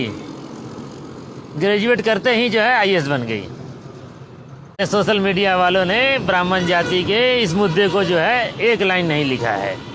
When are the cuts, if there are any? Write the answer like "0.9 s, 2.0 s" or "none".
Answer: 4.8 s

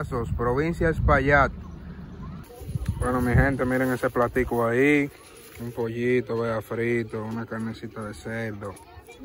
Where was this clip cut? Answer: 2.6 s

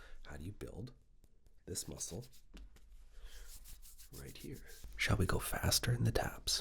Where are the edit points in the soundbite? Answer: 4.8 s

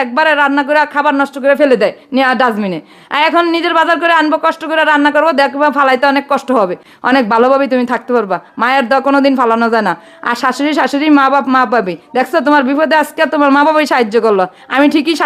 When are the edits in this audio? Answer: 6.9 s

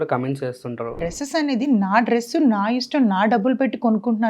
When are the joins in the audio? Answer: 1.0 s

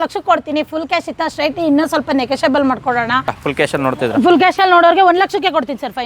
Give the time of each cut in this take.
3.4 s

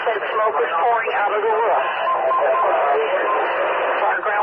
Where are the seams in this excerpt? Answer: 1.7 s

